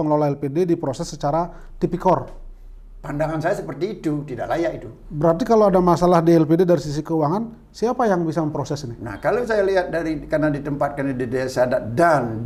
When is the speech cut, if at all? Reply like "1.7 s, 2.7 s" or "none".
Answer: none